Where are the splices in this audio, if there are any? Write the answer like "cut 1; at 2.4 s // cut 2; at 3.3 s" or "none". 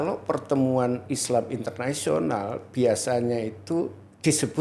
none